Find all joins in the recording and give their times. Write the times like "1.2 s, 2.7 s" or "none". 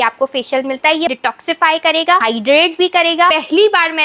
1.1 s, 2.2 s, 3.3 s